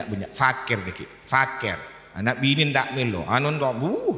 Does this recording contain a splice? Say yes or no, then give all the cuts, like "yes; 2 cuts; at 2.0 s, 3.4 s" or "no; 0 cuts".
no; 0 cuts